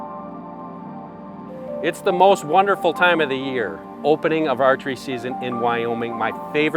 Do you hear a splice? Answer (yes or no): yes